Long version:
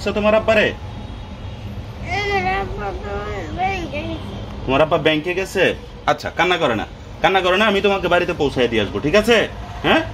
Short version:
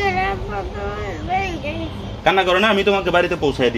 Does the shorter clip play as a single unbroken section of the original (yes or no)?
no